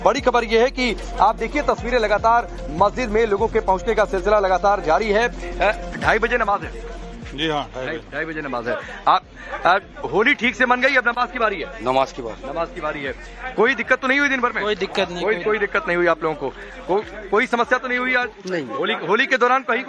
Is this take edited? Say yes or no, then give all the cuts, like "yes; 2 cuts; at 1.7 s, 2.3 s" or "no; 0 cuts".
no; 0 cuts